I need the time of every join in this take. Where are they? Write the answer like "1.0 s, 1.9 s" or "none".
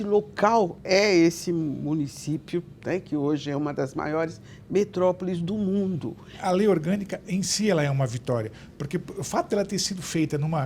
6.4 s